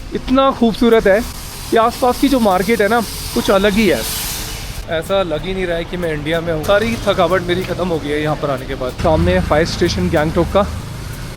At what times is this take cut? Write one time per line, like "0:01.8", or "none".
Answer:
0:06.6
0:09.0